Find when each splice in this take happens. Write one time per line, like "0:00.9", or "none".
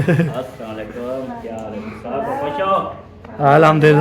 none